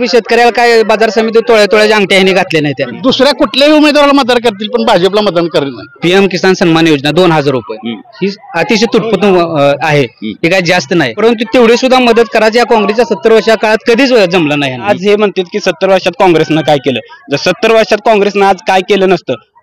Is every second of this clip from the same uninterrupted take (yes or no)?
no